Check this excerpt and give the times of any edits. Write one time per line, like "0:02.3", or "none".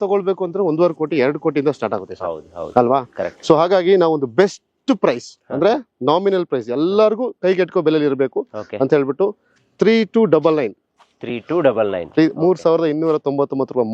none